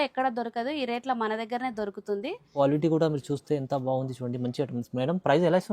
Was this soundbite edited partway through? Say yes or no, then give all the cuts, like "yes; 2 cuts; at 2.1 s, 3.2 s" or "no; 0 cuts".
yes; 1 cut; at 2.5 s